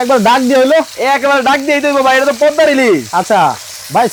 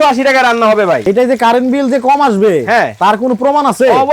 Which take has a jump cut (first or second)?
second